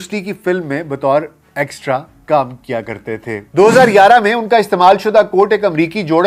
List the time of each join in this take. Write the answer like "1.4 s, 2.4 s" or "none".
3.4 s